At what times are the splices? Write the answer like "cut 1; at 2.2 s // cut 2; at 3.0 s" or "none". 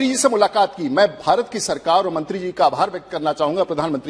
none

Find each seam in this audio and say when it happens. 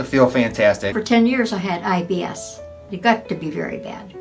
cut 1; at 0.9 s // cut 2; at 2.8 s

